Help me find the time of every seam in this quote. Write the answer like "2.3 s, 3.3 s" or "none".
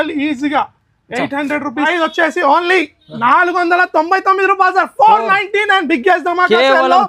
1.8 s